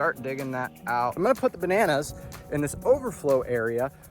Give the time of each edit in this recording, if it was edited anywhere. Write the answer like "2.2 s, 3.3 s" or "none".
1.2 s